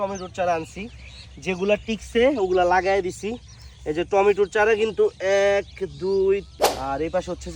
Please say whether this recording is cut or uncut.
cut